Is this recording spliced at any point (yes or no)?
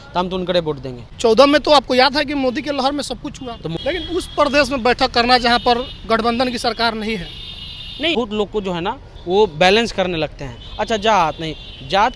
yes